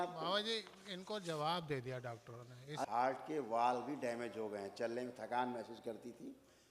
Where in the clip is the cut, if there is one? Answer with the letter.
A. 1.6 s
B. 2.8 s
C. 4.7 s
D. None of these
B